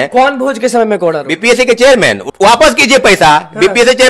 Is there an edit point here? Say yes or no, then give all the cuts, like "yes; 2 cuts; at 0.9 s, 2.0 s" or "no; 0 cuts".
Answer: yes; 1 cut; at 2.2 s